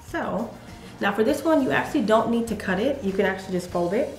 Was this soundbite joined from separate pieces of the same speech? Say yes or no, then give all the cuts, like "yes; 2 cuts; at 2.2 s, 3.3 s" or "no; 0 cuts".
no; 0 cuts